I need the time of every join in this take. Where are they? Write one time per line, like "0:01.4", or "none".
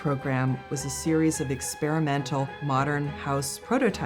0:03.2